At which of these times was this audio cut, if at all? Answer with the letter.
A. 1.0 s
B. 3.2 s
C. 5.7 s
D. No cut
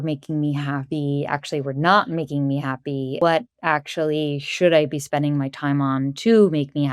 B